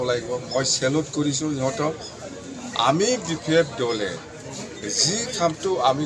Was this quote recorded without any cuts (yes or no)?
yes